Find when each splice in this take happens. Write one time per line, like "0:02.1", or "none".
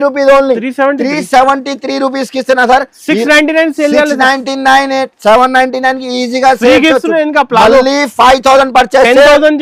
none